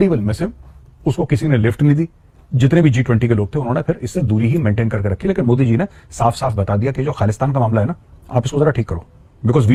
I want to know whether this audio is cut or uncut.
uncut